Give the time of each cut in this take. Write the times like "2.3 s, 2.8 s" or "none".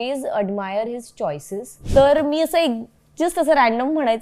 1.8 s